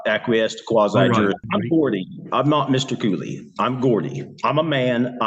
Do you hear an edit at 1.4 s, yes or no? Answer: yes